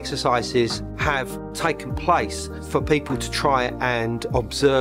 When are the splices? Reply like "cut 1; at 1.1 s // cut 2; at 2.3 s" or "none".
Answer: none